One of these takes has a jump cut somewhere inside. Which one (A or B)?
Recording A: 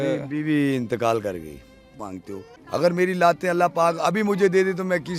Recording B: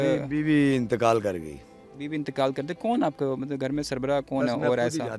A